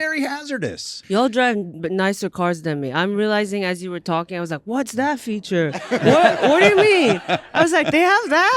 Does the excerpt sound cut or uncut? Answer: cut